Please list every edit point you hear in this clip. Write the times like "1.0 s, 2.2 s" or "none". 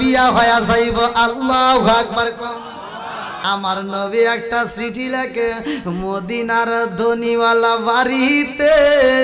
3.4 s